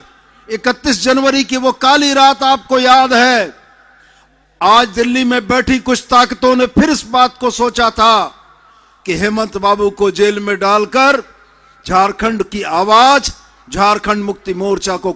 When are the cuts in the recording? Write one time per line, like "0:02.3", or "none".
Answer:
none